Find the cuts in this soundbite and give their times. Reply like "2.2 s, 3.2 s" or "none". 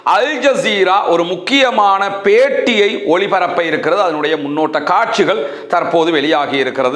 none